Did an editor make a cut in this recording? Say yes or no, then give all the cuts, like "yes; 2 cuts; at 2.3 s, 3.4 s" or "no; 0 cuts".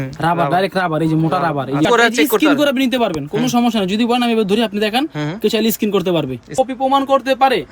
yes; 2 cuts; at 1.8 s, 6.5 s